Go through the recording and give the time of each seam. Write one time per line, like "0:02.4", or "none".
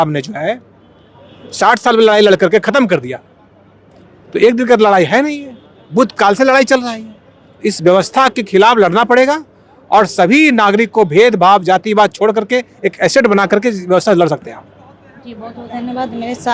none

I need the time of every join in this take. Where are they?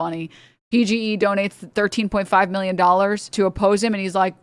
0:01.6
0:03.2

